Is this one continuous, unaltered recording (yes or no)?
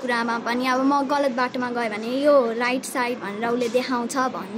yes